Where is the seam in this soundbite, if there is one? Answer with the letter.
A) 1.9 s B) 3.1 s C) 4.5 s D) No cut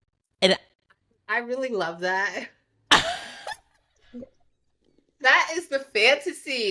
D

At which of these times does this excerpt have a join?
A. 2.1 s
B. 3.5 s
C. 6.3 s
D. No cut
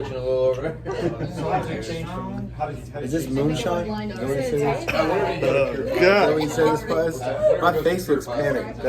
D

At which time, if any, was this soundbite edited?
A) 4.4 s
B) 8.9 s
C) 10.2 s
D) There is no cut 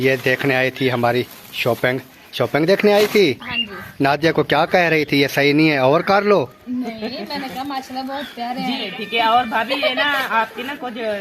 B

